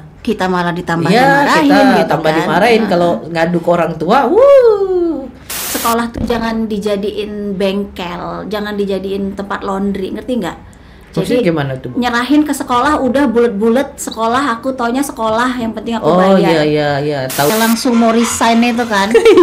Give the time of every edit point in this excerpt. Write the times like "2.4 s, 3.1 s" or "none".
5.7 s, 17.5 s